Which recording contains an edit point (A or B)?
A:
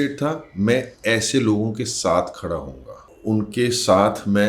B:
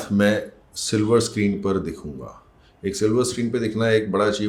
A